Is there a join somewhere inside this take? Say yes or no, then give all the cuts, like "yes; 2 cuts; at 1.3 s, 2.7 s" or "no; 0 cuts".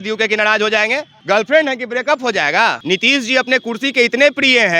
yes; 1 cut; at 2.8 s